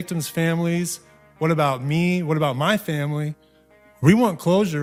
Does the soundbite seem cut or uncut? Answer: uncut